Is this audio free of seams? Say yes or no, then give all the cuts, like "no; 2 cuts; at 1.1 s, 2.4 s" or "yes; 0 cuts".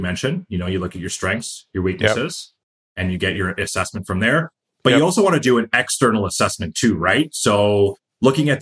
yes; 0 cuts